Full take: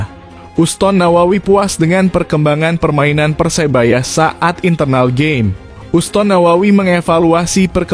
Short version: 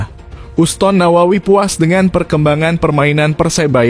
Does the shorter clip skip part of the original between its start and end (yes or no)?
no